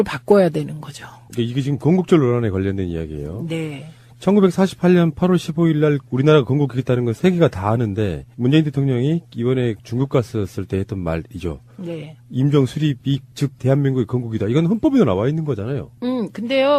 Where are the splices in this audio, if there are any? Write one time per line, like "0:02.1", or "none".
none